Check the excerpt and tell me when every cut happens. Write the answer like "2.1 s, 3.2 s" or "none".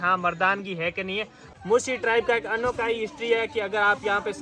1.4 s